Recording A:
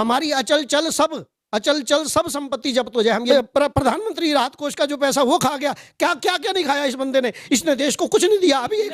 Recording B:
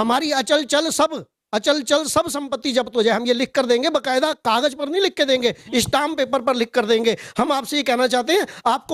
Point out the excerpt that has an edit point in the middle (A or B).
A